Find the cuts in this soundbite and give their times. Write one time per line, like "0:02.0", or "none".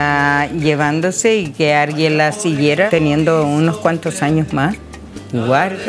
0:02.9